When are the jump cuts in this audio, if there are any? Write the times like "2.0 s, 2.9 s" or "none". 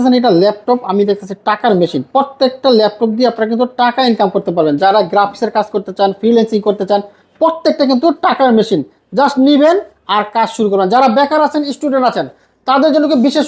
none